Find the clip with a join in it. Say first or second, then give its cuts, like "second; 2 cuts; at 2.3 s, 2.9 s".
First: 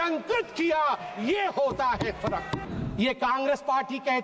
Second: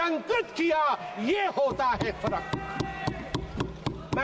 first; 1 cut; at 2.6 s